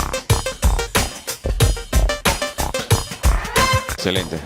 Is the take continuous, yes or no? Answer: no